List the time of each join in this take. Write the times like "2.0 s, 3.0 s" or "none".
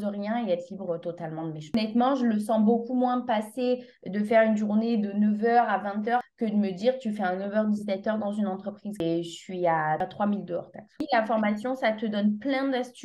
1.7 s, 9.0 s, 11.0 s